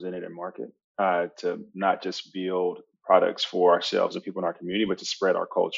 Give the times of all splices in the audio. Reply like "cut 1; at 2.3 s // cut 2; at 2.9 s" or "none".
none